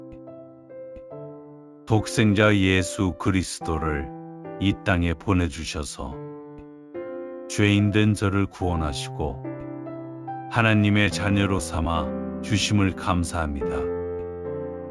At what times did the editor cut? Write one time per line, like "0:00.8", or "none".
0:13.7